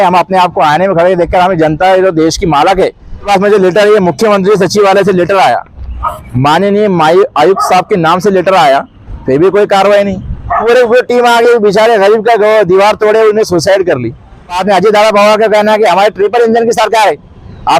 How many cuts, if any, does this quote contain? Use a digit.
3